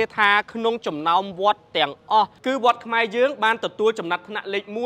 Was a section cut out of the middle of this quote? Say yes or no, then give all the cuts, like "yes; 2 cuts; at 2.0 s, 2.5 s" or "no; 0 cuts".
yes; 1 cut; at 2.4 s